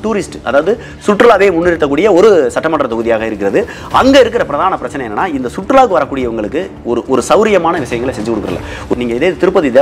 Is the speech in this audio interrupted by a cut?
yes; 1 cut; at 8.9 s

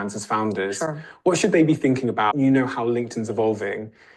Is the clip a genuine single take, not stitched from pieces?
no; 1 cut; at 2.3 s

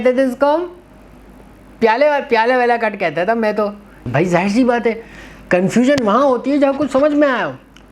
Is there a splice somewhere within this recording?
yes; 1 cut; at 4.1 s

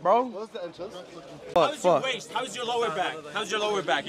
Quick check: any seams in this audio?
yes; 1 cut; at 1.4 s

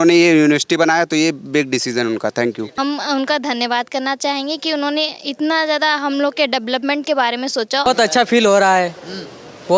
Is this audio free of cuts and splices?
no; 2 cuts; at 2.7 s, 7.9 s

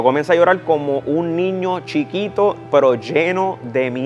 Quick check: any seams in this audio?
no; 0 cuts

